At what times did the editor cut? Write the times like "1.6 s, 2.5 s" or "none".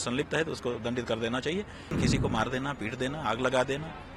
2.0 s